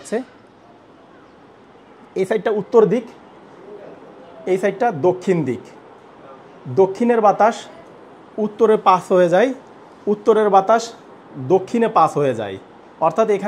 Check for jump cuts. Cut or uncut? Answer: uncut